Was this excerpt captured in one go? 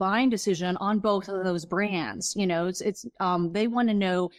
yes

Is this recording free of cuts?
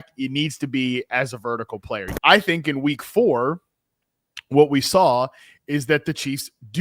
no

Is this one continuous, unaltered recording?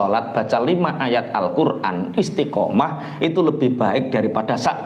yes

